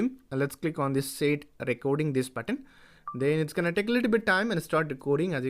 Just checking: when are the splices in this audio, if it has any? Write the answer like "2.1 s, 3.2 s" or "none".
4.3 s